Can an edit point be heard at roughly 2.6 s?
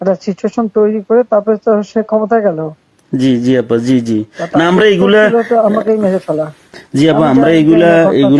no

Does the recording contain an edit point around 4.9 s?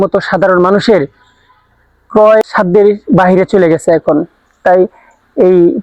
no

